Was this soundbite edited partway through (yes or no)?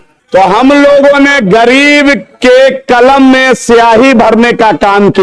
no